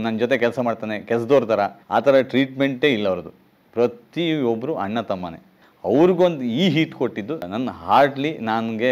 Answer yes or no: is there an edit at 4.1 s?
no